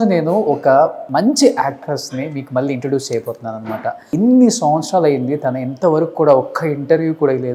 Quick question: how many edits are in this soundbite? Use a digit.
2